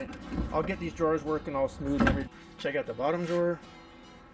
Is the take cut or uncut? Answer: cut